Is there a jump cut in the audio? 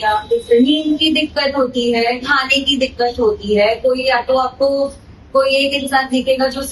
no; 0 cuts

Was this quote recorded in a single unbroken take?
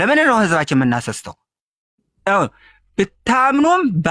yes; 0 cuts

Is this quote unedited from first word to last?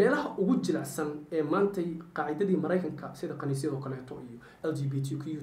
yes; 0 cuts

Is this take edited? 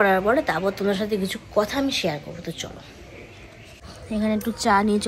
no; 0 cuts

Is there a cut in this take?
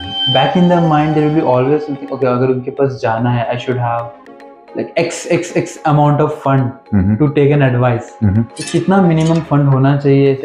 no; 0 cuts

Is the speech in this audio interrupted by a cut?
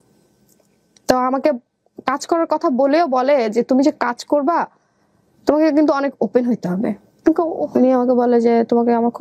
yes; 1 cut; at 7.2 s

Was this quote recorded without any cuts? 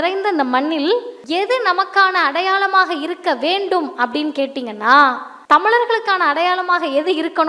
no; 2 cuts; at 1.2 s, 5.3 s

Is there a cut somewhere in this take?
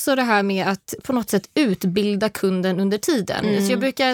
yes; 1 cut; at 0.9 s

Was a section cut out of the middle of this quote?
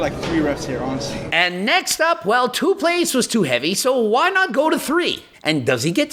yes; 2 cuts; at 1.2 s, 5.2 s

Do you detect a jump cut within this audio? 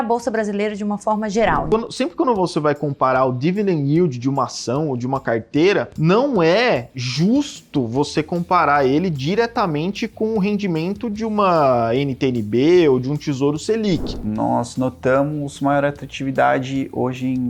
yes; 3 cuts; at 1.7 s, 5.9 s, 14.1 s

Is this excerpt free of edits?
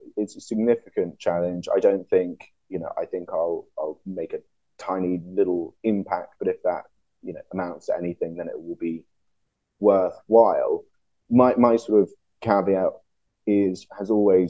yes; 0 cuts

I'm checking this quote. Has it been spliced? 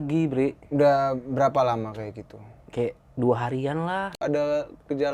yes; 1 cut; at 4.2 s

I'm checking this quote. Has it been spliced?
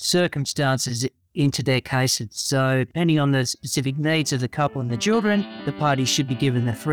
yes; 1 cut; at 2.9 s

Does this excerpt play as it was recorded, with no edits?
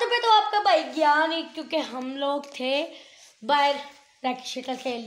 yes; 0 cuts

